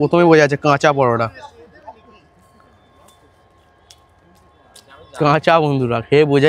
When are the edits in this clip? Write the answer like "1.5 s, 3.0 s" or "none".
none